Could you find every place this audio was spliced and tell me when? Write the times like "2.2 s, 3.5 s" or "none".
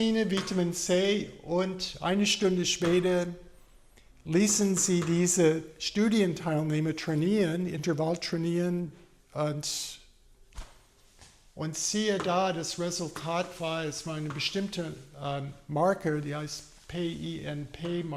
none

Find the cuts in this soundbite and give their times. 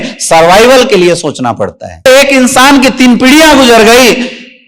2.1 s

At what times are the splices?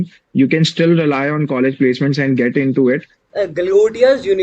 3.2 s

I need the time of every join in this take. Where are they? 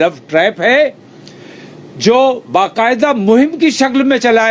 none

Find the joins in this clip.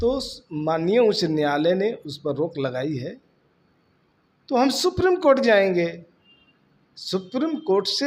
none

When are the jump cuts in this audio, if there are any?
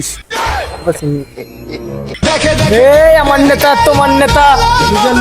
2.2 s

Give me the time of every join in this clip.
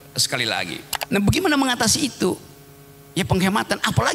0.9 s

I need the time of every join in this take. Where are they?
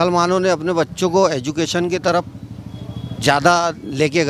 none

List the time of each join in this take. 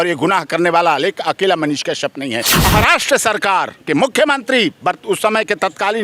2.6 s

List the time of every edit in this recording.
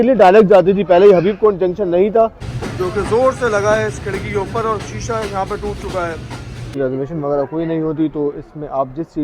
2.5 s, 6.7 s

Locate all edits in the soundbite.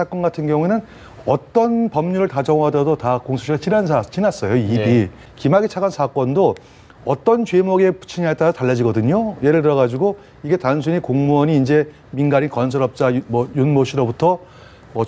5.2 s

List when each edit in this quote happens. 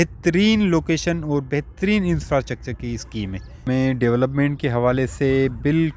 3.7 s

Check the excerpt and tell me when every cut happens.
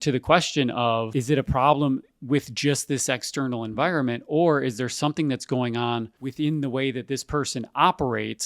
1.1 s, 6.2 s

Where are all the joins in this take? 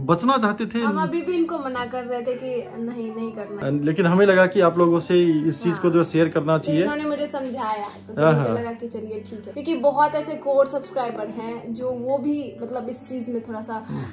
none

